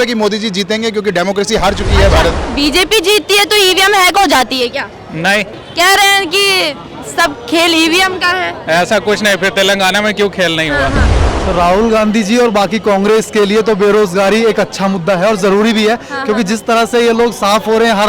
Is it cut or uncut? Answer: cut